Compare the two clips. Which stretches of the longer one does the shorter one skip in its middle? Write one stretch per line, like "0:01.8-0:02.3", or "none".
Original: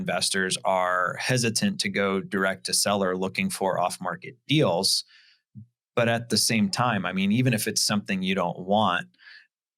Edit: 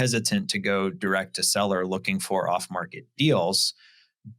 none